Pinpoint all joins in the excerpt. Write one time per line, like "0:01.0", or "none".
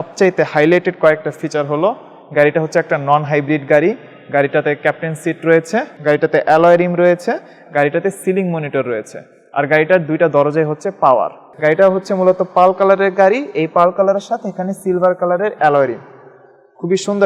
0:05.9
0:11.4